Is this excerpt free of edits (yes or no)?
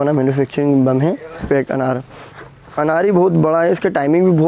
no